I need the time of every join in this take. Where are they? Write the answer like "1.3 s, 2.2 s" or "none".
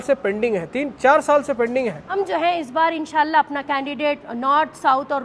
2.0 s